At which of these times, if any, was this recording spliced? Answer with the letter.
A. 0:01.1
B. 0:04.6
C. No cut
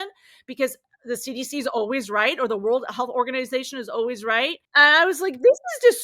B